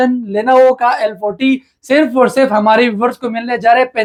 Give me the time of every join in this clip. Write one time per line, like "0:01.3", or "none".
none